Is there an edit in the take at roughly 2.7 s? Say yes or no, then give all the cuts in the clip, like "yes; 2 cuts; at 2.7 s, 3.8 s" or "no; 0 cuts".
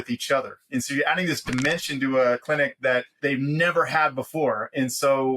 yes; 1 cut; at 2.7 s